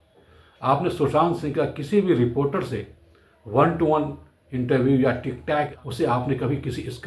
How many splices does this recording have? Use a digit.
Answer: 1